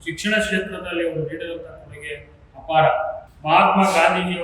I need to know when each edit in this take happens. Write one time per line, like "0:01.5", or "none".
0:03.2